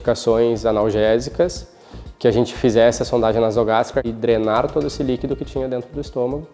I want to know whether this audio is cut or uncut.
cut